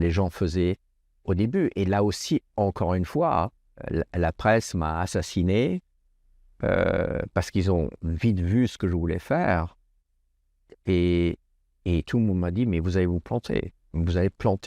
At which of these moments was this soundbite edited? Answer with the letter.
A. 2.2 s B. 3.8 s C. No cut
B